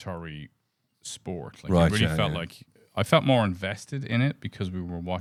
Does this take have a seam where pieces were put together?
no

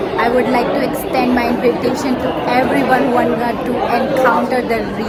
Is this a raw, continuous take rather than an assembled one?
yes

